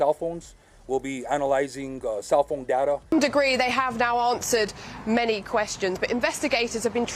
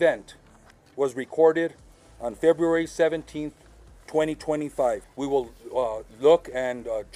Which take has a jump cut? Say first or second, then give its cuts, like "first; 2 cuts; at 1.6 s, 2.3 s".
first; 1 cut; at 3.0 s